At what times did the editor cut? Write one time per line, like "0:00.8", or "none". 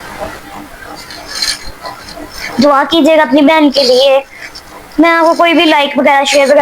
0:02.4